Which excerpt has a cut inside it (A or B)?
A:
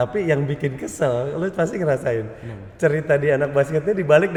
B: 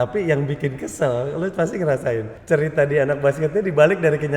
B